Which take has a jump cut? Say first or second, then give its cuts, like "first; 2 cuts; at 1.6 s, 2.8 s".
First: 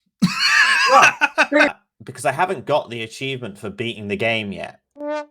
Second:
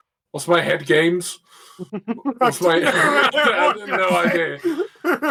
first; 1 cut; at 1.7 s